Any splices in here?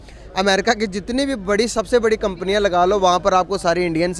no; 0 cuts

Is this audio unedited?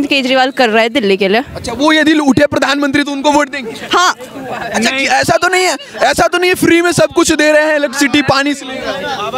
yes; 0 cuts

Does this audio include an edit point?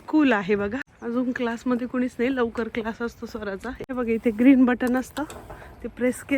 yes; 2 cuts; at 0.9 s, 3.7 s

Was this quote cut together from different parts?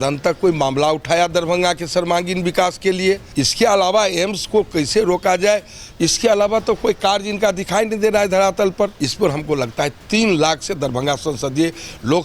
yes; 2 cuts; at 3.3 s, 8.9 s

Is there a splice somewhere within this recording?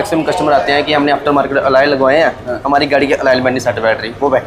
no; 0 cuts

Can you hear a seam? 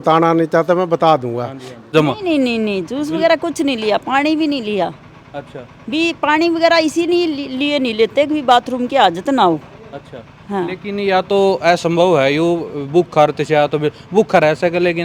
yes; 1 cut; at 1.8 s

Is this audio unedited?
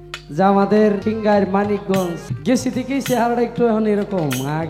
no; 2 cuts; at 1.0 s, 2.3 s

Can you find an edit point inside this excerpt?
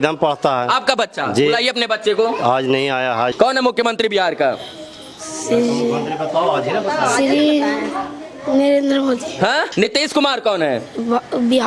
yes; 2 cuts; at 3.3 s, 9.7 s

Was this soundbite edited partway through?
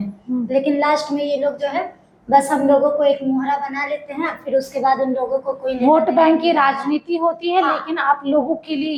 no; 0 cuts

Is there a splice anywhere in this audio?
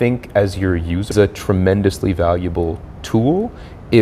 yes; 1 cut; at 1.1 s

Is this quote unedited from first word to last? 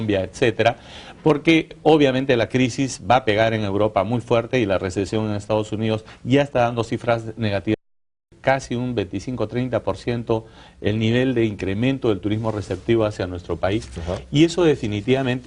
yes; 0 cuts

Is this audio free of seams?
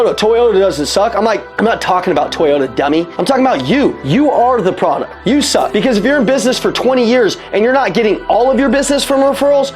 no; 4 cuts; at 1.5 s, 3.1 s, 4.0 s, 5.5 s

